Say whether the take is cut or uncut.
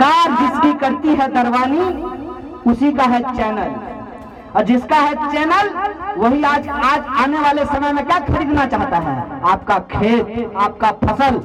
uncut